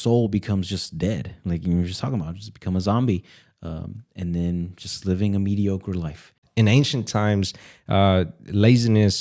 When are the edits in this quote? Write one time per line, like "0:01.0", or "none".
0:06.4